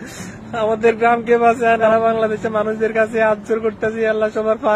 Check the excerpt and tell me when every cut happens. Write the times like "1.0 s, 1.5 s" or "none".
1.8 s